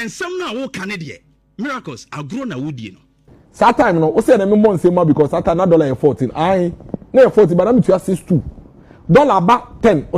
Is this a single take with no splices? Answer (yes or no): no